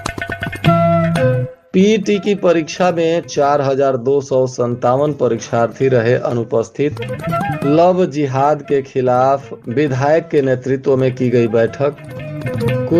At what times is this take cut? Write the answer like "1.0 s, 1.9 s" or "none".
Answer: 1.5 s